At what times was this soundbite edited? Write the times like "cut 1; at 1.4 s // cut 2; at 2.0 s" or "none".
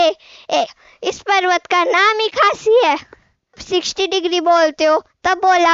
cut 1; at 3.6 s